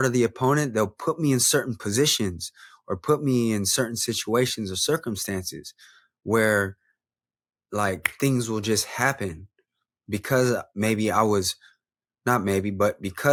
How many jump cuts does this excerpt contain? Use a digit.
0